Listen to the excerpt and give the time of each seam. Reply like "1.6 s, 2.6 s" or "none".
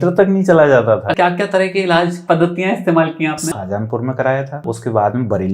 1.1 s, 3.5 s, 4.6 s